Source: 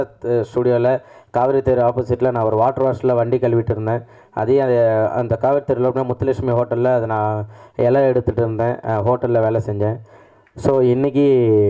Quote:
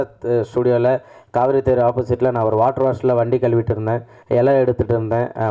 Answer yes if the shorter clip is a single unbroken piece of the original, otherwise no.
no